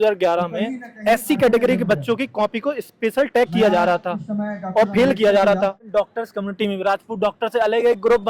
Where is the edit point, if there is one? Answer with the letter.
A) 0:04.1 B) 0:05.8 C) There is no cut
B